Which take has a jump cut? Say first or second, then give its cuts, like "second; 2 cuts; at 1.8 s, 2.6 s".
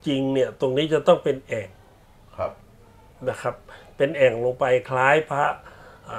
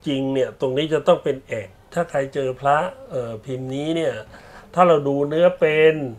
second; 1 cut; at 1.9 s